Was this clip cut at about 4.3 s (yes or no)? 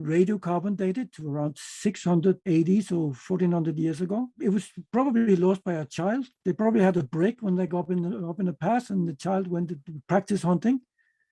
yes